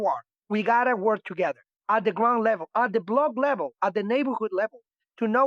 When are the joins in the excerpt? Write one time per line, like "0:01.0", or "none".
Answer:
0:01.7